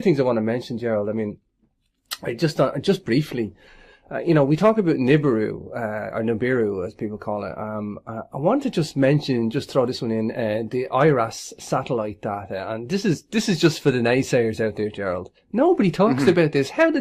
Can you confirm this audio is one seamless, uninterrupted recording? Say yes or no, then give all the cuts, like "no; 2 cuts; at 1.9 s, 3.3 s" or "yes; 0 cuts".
no; 1 cut; at 3.5 s